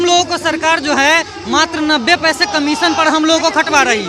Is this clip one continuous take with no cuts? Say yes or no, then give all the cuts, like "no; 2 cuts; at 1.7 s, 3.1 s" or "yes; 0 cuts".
yes; 0 cuts